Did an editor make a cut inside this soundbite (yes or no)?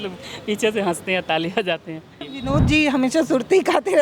yes